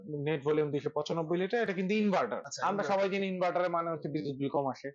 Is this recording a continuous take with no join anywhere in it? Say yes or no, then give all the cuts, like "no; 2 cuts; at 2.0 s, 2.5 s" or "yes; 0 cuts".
no; 1 cut; at 2.5 s